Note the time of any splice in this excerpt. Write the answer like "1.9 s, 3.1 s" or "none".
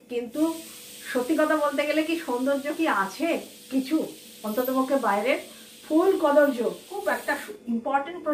6.9 s